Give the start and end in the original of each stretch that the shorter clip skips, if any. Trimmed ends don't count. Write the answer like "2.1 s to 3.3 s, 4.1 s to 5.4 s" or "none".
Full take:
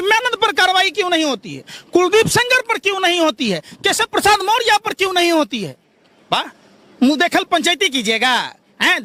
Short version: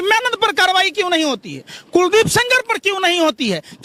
none